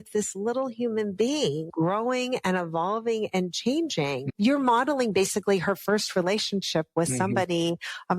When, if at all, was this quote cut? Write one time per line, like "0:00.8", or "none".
0:01.7
0:04.3